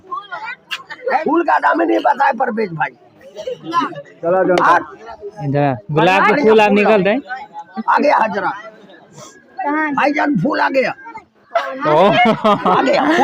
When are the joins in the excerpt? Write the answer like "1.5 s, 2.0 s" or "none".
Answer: 1.2 s, 4.1 s